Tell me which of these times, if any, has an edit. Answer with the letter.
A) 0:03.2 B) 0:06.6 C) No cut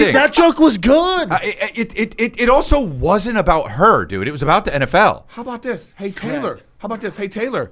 C